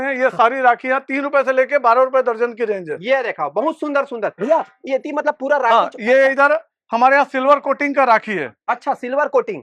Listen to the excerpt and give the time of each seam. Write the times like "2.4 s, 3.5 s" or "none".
none